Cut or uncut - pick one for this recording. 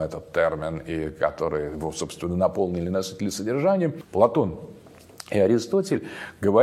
cut